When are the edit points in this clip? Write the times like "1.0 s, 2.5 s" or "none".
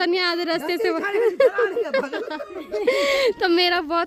none